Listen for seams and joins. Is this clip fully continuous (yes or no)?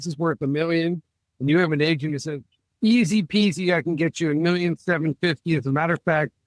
yes